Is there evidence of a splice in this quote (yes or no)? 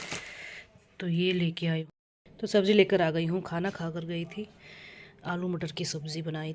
yes